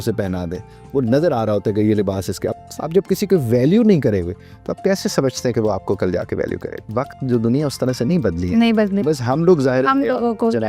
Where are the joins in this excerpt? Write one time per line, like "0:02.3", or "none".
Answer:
0:02.5
0:06.9